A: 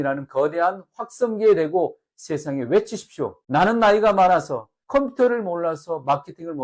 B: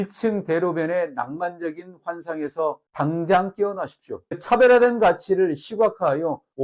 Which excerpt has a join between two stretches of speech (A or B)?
B